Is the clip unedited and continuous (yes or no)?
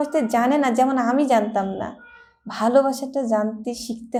yes